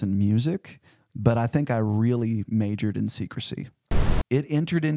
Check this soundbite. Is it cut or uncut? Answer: cut